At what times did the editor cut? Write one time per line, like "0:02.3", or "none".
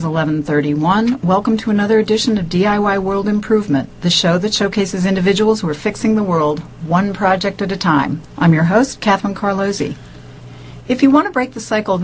none